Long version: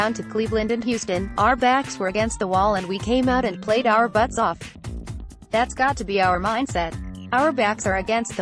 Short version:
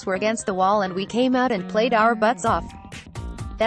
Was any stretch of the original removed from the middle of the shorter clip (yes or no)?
no